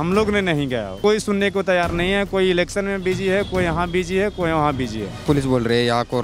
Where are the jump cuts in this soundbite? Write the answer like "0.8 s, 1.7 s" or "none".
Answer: 1.0 s, 5.2 s